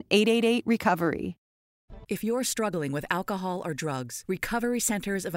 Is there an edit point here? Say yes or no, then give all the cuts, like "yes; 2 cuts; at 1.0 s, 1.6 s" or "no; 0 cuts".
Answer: yes; 1 cut; at 1.9 s